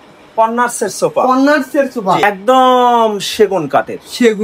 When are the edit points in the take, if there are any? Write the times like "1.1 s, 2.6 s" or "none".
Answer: 2.2 s